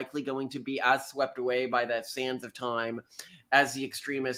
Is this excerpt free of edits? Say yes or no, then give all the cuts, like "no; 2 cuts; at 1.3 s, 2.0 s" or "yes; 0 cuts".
yes; 0 cuts